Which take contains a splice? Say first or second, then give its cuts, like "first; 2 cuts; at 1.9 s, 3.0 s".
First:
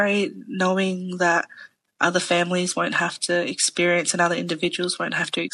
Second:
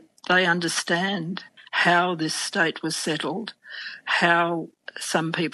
second; 1 cut; at 1.5 s